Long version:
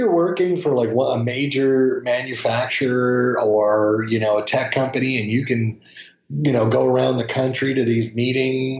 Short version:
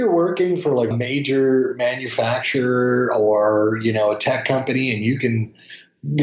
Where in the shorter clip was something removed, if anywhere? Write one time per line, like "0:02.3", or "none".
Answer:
0:00.9